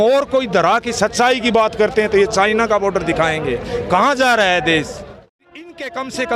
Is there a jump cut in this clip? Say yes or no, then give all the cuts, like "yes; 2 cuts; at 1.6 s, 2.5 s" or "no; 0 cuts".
yes; 1 cut; at 5.4 s